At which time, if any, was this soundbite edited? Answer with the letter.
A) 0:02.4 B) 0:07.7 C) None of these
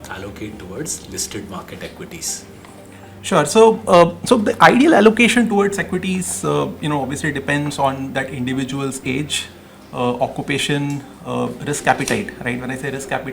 C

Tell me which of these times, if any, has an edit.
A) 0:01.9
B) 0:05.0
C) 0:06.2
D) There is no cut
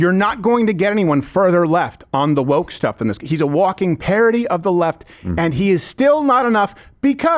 D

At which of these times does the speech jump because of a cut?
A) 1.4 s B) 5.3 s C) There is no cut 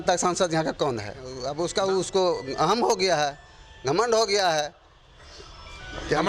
A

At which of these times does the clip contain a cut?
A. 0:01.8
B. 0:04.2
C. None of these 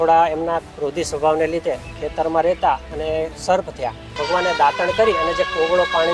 B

